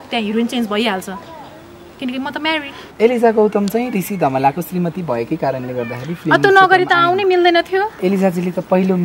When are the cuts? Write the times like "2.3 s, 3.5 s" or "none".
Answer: 2.9 s, 8.0 s